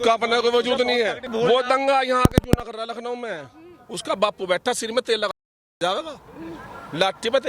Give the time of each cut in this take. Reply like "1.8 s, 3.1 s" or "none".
1.2 s